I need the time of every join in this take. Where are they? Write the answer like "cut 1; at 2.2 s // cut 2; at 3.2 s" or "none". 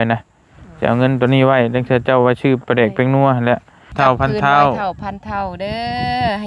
cut 1; at 3.9 s